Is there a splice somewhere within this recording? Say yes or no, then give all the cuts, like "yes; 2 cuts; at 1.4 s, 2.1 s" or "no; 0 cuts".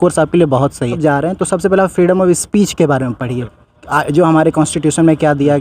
yes; 1 cut; at 1.0 s